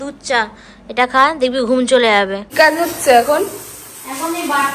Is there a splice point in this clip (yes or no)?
yes